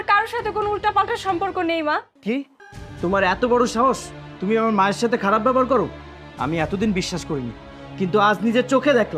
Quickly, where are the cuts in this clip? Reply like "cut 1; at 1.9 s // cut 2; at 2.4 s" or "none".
cut 1; at 2.1 s